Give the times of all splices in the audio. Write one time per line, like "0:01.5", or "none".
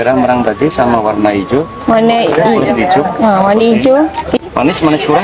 none